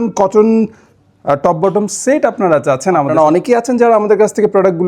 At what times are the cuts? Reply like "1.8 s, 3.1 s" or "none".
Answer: 3.1 s